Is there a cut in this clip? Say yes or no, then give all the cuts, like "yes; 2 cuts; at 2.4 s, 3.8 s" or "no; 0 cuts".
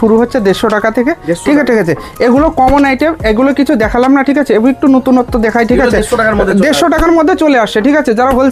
no; 0 cuts